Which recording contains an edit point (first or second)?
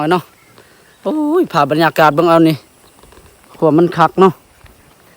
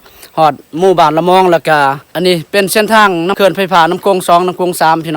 second